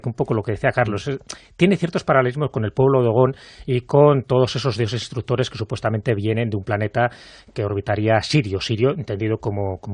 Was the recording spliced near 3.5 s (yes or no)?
yes